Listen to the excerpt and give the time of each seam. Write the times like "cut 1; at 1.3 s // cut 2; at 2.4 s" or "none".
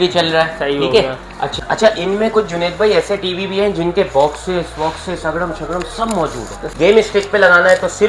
cut 1; at 1.5 s // cut 2; at 6.7 s